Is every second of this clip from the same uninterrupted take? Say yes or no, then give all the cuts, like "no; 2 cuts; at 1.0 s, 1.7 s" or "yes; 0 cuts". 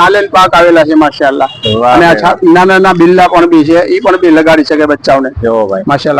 yes; 0 cuts